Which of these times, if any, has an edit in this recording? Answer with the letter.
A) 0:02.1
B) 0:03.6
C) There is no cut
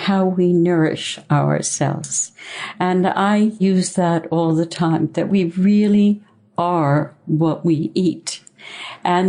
B